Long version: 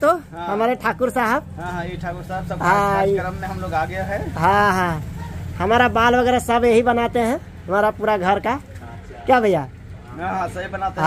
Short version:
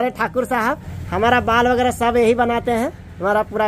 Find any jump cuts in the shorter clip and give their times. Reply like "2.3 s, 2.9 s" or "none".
0.9 s

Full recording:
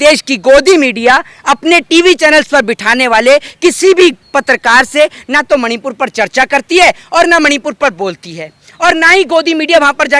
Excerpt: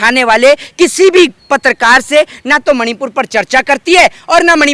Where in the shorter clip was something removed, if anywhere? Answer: none

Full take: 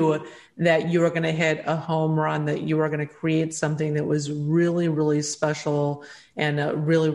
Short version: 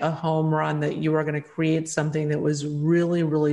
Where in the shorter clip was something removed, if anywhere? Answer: none

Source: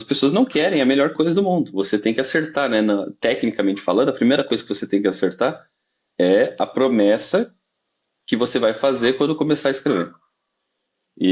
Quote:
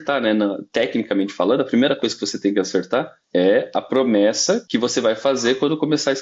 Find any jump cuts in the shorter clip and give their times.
3.2 s, 4.6 s

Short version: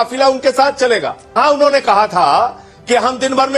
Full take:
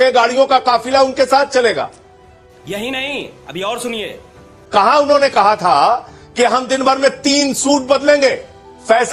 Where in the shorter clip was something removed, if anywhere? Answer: 1.4 s

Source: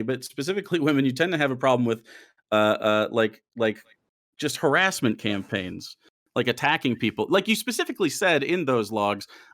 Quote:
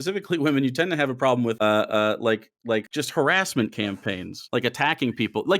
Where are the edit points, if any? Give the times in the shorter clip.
1.6 s, 2.9 s, 4.3 s

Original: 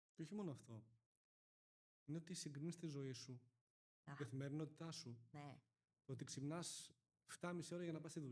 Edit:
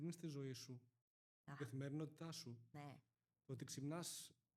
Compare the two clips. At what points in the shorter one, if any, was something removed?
none

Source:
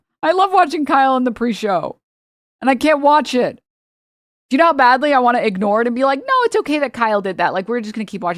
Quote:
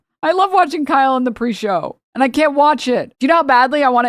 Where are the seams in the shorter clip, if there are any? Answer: 2.0 s, 3.1 s

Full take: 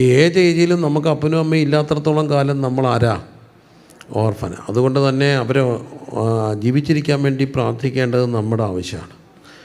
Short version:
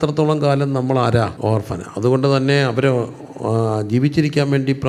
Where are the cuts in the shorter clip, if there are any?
1.3 s

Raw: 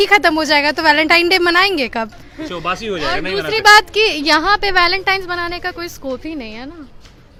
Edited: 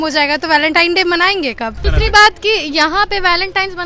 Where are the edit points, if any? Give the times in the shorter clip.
1.8 s

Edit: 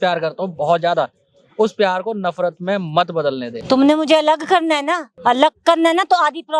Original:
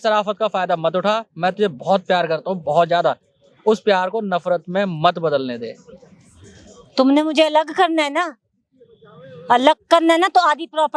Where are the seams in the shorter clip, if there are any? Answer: 3.5 s, 5.1 s

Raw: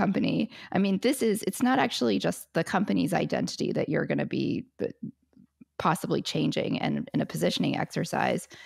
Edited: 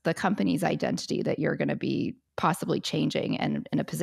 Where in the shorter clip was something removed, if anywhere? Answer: 2.2 s

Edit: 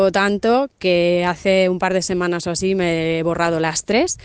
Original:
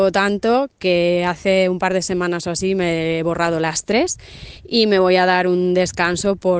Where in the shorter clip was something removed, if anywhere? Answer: none

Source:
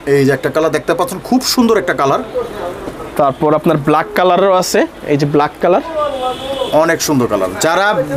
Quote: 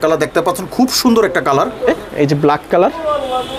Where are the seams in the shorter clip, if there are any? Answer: 2.0 s

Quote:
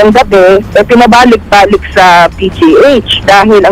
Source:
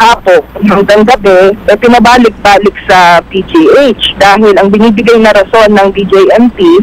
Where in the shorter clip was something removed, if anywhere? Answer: none

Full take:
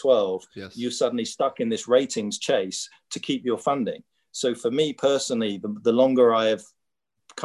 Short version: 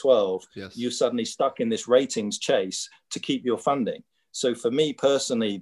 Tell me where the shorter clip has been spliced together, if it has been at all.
none

